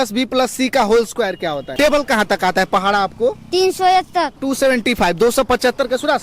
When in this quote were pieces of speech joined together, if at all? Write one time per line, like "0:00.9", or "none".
0:01.7
0:04.4